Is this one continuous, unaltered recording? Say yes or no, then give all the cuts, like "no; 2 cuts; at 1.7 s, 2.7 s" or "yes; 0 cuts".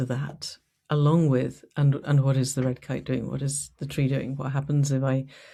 yes; 0 cuts